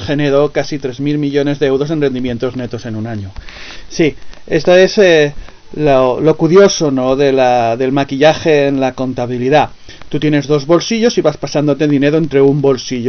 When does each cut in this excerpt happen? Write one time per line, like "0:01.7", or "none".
none